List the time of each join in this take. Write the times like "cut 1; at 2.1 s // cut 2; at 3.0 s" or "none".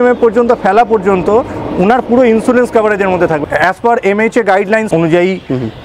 cut 1; at 3.4 s // cut 2; at 4.9 s